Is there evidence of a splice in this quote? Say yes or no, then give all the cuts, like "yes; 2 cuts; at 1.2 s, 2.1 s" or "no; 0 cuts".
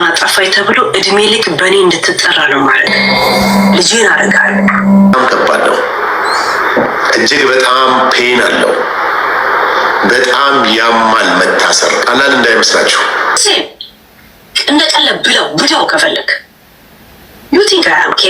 yes; 2 cuts; at 5.1 s, 13.4 s